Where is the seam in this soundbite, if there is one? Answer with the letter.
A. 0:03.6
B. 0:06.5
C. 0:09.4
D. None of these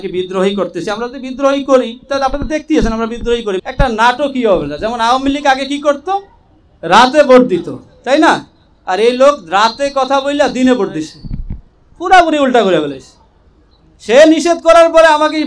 A